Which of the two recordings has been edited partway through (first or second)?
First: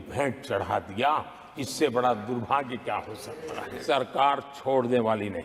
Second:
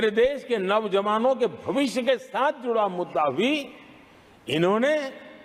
first